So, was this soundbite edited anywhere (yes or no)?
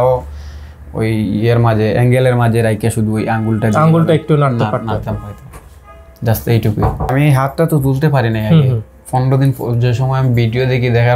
yes